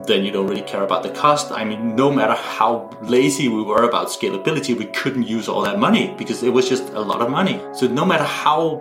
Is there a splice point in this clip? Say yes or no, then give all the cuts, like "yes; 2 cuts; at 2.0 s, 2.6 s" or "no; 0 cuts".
yes; 1 cut; at 7.7 s